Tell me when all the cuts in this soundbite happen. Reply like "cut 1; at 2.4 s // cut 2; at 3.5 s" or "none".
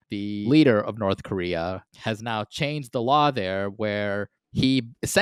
none